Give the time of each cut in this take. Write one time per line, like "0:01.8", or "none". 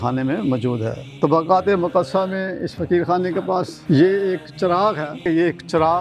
0:01.0
0:03.7
0:05.2